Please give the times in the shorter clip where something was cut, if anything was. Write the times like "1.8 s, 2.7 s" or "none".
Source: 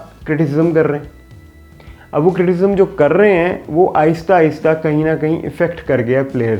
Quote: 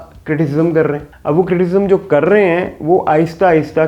1.1 s